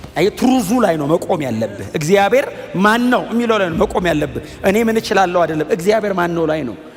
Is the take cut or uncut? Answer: uncut